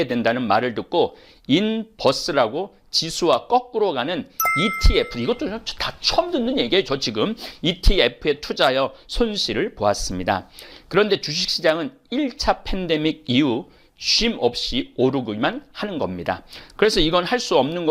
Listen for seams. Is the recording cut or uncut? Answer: uncut